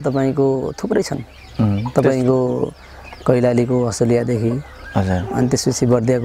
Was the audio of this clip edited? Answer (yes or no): no